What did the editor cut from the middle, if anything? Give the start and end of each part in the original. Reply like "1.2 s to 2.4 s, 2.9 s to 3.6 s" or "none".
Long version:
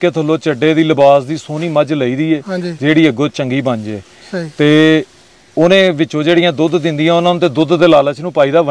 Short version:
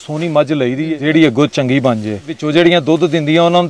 2.3 s to 2.7 s, 4.2 s to 6.1 s